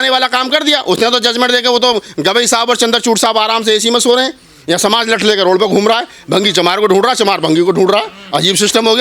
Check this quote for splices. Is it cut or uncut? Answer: uncut